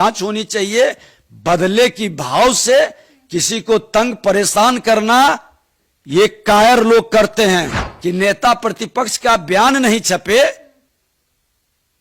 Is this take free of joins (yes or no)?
no